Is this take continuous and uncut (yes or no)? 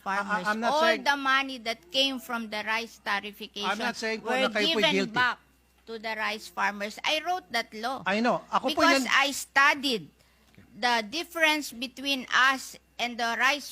yes